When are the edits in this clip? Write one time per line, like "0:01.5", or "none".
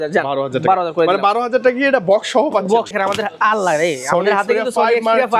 0:02.9